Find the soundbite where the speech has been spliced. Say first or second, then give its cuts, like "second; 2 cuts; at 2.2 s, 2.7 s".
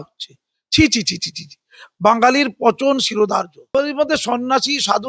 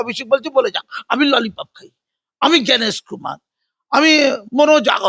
first; 1 cut; at 3.7 s